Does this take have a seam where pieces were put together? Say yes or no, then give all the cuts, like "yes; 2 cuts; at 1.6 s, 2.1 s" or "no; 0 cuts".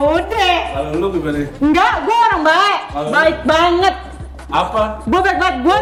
no; 0 cuts